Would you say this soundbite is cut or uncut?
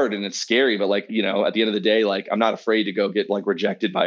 cut